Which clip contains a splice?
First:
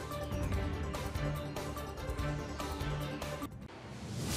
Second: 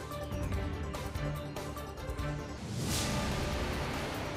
second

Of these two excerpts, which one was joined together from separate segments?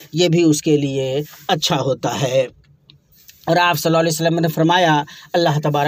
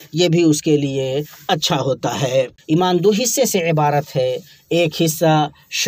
second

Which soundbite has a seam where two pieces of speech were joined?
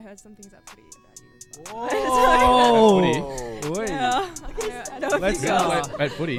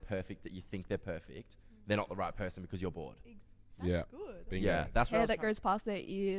second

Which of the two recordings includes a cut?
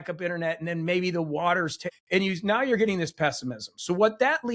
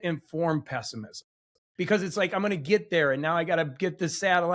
first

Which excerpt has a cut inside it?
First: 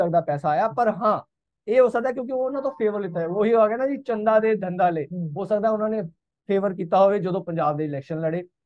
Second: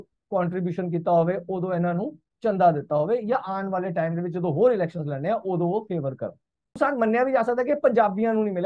second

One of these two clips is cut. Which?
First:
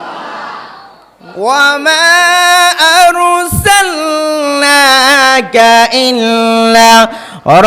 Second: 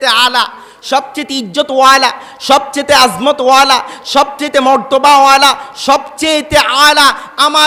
first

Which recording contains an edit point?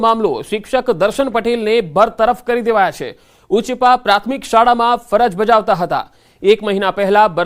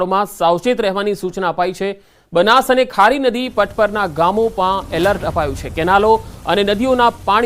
second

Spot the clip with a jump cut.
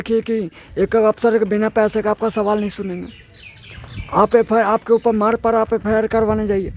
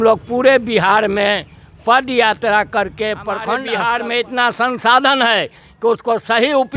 second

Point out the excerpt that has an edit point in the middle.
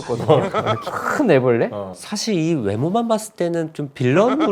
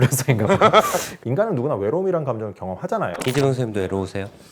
second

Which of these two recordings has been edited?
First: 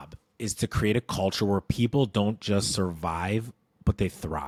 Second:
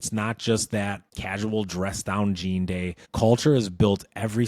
second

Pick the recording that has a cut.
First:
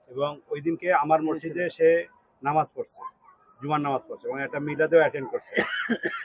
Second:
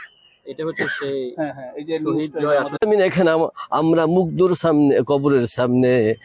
second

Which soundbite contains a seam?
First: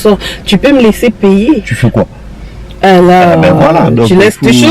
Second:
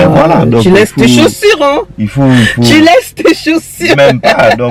first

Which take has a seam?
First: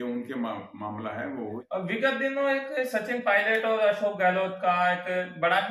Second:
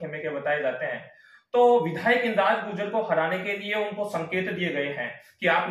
first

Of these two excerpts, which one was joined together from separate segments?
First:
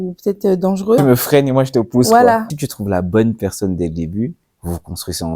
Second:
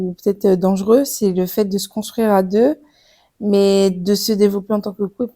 first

